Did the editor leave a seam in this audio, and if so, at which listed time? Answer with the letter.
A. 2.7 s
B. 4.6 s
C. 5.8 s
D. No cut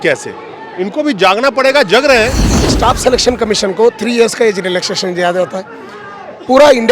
A